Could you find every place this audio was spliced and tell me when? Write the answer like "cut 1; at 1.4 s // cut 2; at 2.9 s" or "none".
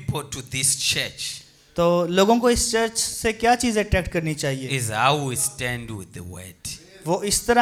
none